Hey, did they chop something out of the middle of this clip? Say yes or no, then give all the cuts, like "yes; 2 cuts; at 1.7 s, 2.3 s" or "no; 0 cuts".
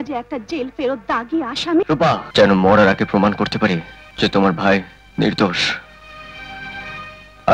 yes; 3 cuts; at 2.2 s, 4.0 s, 5.0 s